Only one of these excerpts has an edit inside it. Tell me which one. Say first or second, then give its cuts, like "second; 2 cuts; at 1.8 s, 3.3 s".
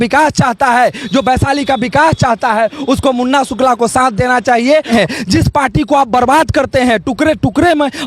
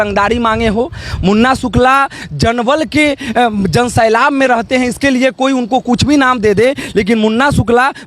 first; 1 cut; at 4.9 s